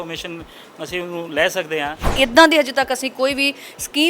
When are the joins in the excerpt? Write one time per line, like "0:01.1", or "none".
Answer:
0:02.0